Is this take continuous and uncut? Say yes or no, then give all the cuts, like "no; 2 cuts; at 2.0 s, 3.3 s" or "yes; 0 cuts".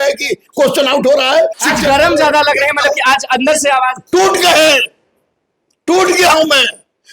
no; 1 cut; at 1.6 s